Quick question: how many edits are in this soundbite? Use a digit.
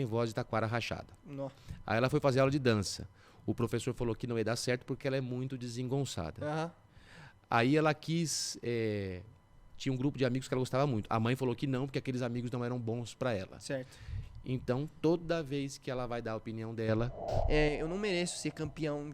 1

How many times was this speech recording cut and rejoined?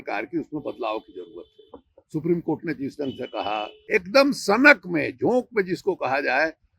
1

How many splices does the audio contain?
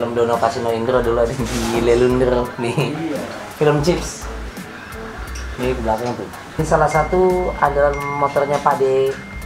1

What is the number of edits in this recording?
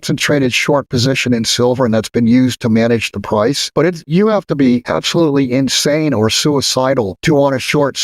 3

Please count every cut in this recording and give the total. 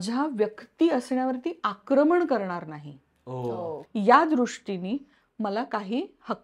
1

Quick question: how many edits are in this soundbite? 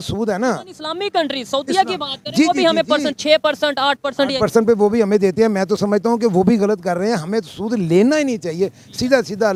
0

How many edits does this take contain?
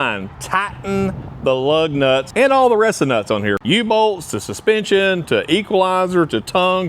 2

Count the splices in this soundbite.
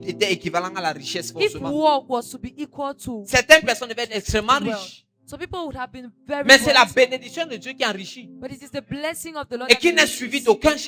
0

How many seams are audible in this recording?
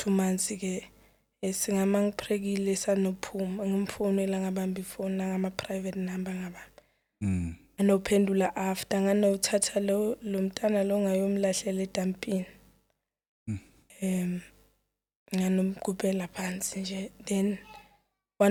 0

